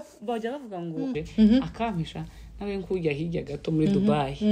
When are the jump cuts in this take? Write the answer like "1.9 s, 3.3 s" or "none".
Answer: 1.1 s